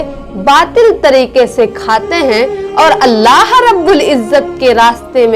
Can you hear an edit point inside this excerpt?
no; 0 cuts

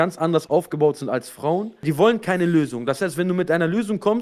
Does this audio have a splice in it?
yes; 1 cut; at 1.8 s

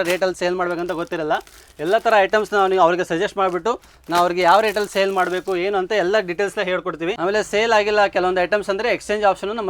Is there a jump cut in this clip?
no; 0 cuts

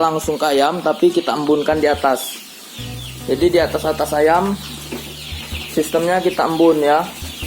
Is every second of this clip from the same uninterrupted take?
yes; 0 cuts

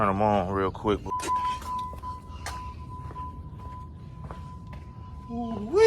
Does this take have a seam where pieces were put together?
yes; 1 cut; at 1.1 s

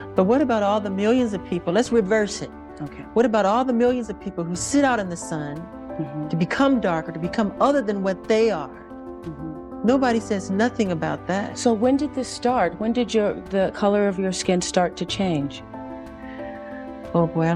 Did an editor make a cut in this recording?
no; 0 cuts

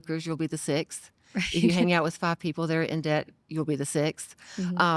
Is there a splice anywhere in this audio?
no; 0 cuts

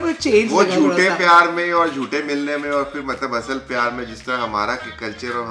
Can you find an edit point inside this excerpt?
no; 0 cuts

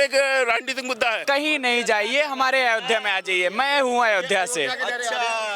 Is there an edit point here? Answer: yes; 1 cut; at 1.2 s

